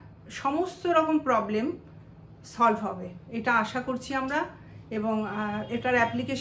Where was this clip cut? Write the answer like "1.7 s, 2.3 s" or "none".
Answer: none